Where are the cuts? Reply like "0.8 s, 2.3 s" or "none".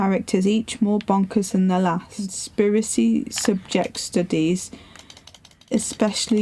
2.4 s